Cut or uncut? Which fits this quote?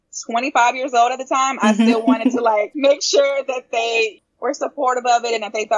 cut